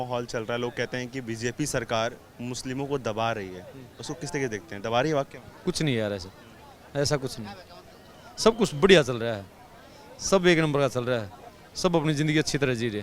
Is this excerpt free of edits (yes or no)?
no